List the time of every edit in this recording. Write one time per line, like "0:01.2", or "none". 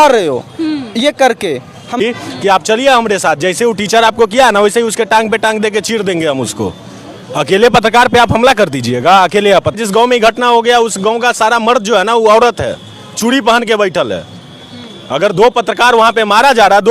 0:02.0
0:09.8